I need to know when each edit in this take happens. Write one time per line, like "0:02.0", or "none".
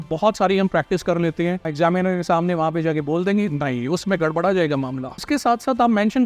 0:01.7
0:05.2